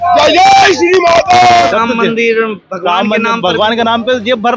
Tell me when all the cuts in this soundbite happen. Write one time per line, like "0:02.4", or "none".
0:01.6